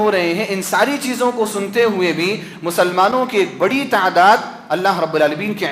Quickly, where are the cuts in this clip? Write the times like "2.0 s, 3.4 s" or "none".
none